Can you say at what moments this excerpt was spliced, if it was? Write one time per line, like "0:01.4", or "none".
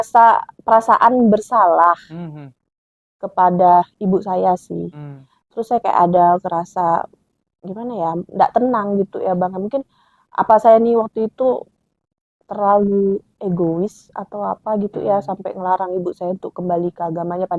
none